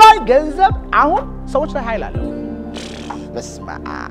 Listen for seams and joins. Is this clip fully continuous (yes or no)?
yes